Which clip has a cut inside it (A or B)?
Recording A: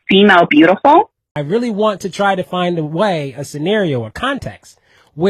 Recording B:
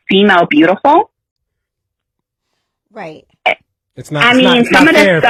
A